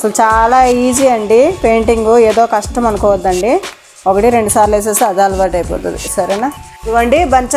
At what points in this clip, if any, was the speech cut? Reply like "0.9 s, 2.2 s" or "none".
6.7 s